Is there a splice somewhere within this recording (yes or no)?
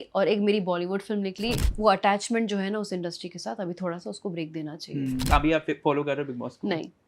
yes